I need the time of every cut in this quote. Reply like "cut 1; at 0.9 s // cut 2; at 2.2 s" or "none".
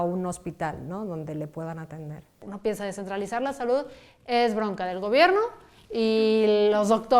cut 1; at 2.4 s